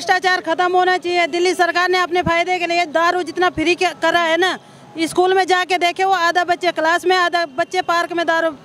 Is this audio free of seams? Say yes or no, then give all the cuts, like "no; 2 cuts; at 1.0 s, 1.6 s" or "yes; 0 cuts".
yes; 0 cuts